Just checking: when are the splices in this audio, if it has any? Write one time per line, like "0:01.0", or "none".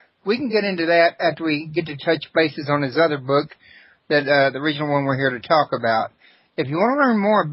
0:02.6